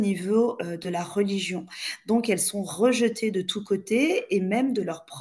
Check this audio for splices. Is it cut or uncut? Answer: uncut